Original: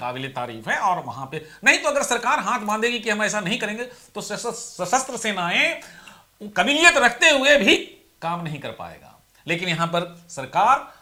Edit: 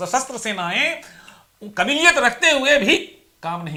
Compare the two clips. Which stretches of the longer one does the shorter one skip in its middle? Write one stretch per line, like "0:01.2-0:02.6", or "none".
none